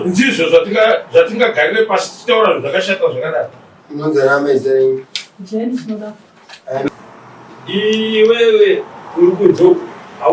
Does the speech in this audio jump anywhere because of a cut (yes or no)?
yes